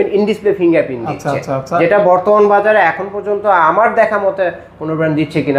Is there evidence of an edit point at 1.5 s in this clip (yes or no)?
no